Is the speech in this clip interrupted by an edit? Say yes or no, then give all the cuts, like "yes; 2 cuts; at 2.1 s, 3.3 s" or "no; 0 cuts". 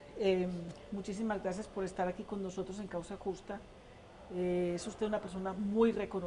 no; 0 cuts